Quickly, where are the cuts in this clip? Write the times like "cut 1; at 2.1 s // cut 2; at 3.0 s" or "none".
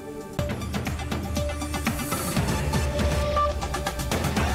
none